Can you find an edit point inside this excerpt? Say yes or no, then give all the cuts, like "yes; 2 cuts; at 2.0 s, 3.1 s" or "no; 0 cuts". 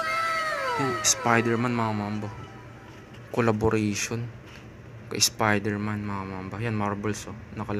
yes; 1 cut; at 1.0 s